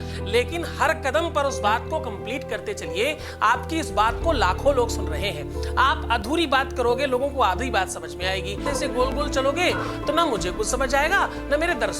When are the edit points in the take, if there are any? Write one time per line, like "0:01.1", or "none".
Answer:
0:08.7